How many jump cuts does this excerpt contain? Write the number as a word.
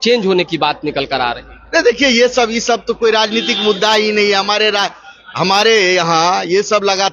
zero